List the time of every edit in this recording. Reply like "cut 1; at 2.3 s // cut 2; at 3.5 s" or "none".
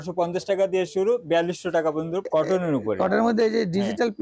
cut 1; at 2.2 s